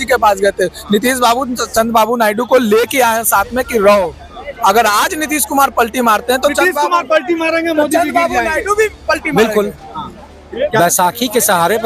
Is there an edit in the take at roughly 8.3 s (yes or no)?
no